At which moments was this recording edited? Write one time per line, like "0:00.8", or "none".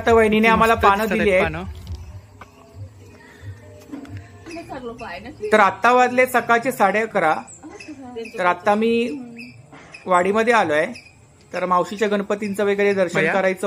none